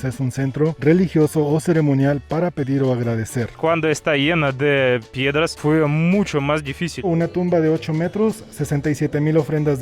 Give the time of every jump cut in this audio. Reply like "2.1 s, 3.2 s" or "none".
3.6 s, 7.1 s